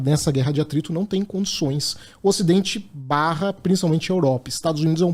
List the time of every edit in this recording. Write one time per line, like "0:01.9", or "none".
none